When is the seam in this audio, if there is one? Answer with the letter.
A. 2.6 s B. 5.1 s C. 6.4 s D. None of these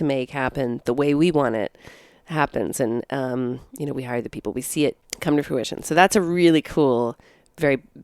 B